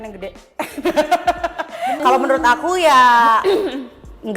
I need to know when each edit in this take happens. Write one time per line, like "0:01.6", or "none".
0:02.0